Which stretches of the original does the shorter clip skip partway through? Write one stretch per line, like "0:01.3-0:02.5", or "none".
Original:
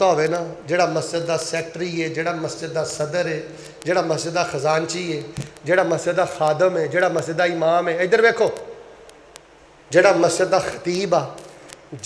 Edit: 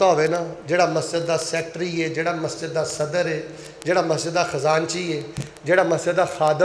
none